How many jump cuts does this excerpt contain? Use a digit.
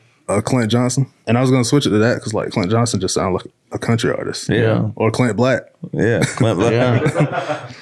2